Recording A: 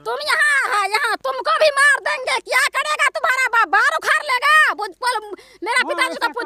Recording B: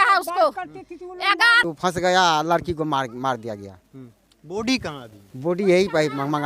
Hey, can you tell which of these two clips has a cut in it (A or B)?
B